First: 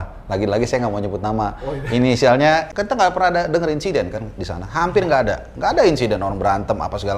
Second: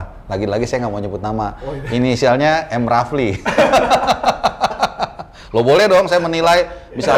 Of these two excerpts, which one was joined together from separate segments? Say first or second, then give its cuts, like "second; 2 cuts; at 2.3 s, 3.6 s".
first; 1 cut; at 2.7 s